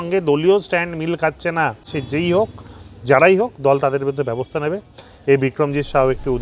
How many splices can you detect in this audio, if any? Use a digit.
1